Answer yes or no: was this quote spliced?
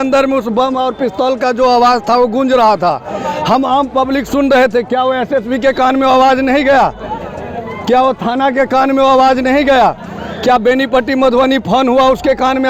no